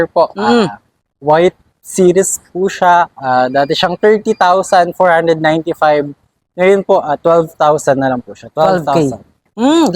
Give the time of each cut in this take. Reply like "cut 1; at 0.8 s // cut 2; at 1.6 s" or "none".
none